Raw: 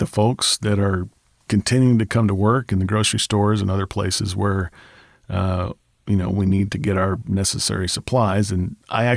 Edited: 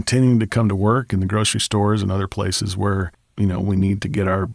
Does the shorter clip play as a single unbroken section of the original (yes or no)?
no